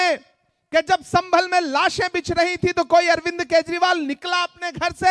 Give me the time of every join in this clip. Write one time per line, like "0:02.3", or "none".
none